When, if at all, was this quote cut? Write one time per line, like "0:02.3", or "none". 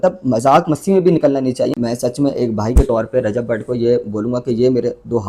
0:01.8